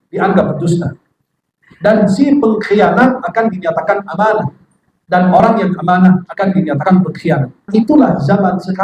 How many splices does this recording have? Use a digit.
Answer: 1